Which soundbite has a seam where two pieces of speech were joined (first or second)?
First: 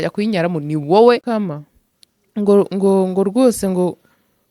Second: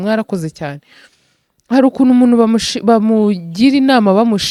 first